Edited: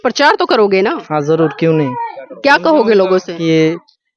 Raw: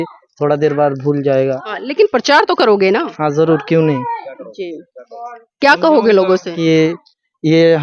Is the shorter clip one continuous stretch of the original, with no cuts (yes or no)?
no